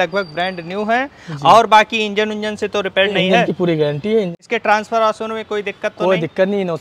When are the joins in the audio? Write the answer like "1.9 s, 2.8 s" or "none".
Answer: 4.4 s